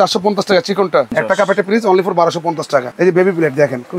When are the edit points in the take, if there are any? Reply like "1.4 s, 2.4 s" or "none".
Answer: 1.1 s, 2.9 s